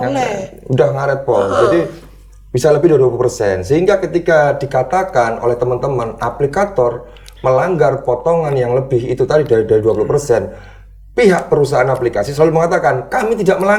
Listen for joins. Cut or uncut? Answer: uncut